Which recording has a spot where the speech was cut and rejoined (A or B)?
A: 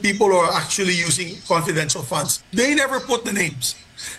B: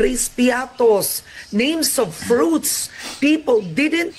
A